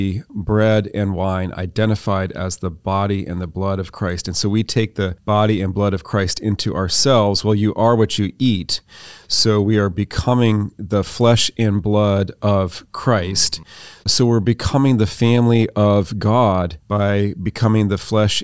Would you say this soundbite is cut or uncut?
cut